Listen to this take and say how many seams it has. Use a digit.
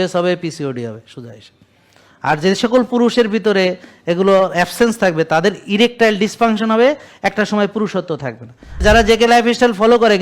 1